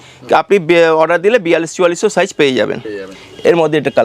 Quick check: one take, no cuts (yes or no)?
yes